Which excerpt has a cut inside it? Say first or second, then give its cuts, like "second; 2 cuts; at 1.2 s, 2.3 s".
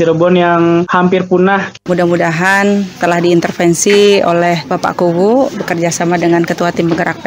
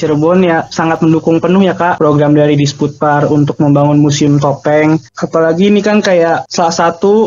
first; 2 cuts; at 1.8 s, 2.9 s